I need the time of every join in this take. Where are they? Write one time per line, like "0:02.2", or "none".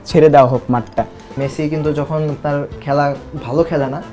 0:01.3